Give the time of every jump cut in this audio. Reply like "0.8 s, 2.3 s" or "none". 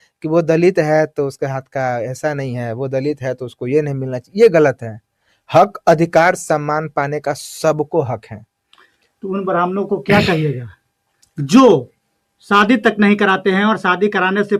none